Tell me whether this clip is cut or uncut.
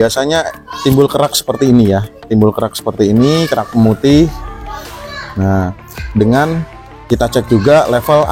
uncut